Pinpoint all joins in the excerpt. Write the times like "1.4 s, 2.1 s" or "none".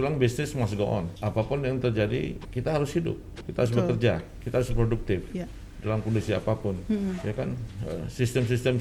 1.1 s, 2.5 s, 3.4 s, 4.4 s